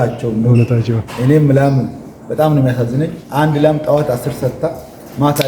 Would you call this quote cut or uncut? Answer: uncut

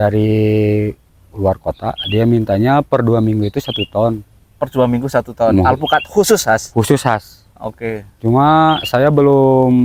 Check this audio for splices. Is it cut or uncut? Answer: uncut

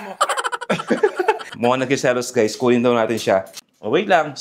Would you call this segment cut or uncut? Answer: uncut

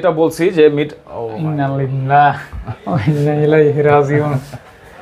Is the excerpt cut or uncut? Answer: uncut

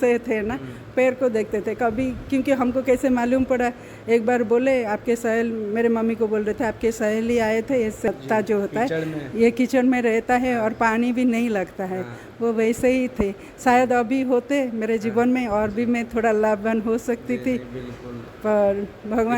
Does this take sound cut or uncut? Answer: cut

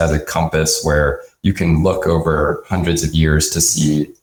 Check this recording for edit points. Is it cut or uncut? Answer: uncut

